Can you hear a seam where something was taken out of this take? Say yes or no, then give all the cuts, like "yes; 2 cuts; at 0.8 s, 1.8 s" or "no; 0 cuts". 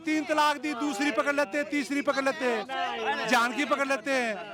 no; 0 cuts